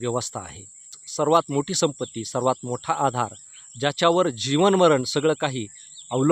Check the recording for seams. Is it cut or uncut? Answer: cut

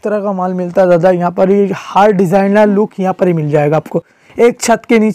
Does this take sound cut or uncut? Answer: uncut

